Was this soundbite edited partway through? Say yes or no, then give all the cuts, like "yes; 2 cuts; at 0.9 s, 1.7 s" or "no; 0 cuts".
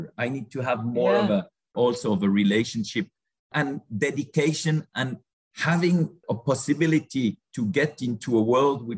yes; 2 cuts; at 1.7 s, 5.2 s